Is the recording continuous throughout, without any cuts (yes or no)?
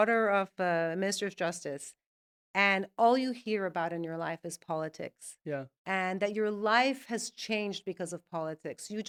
yes